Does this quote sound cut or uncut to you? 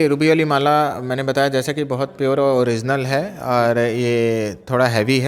uncut